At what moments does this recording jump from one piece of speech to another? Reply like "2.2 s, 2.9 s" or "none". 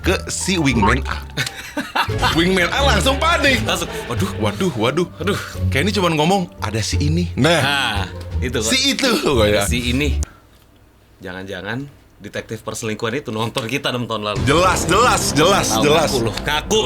10.2 s